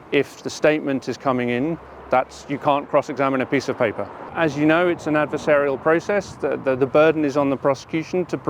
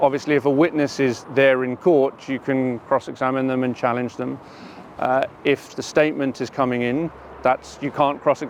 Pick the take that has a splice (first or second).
first